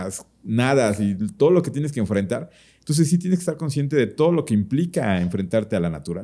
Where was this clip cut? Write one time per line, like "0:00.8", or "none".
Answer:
none